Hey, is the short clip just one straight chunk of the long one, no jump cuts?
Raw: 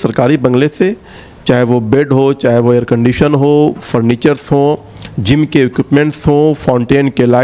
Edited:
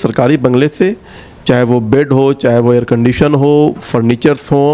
yes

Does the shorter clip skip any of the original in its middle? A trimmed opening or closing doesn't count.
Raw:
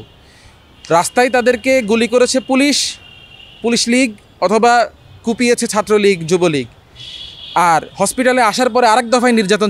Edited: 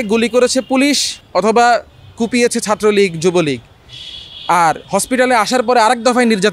yes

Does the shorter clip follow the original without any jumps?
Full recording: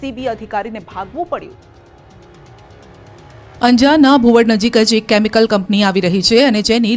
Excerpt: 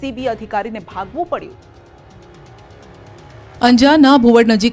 yes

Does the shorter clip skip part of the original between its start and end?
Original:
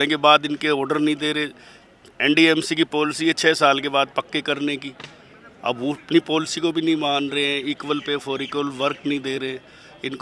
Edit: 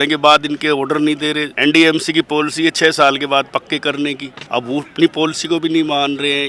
yes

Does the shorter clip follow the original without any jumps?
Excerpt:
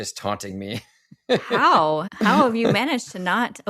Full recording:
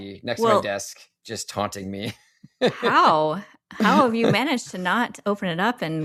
no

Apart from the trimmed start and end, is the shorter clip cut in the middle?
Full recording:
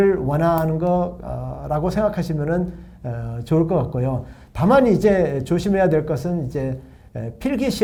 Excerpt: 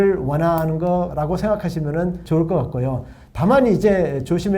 yes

